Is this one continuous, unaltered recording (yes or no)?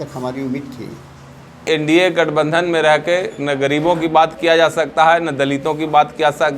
no